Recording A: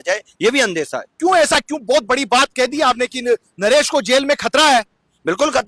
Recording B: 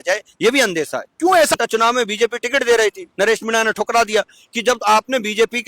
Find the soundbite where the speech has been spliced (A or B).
B